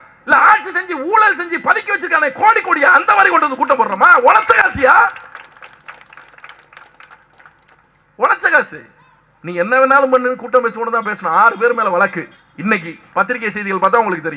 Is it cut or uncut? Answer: cut